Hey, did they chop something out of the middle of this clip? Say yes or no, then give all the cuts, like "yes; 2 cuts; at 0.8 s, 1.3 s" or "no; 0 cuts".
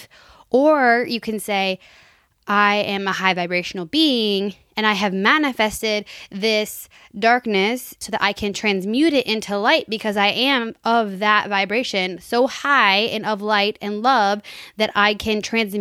no; 0 cuts